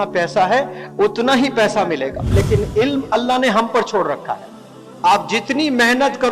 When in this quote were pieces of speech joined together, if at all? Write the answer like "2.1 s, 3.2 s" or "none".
2.3 s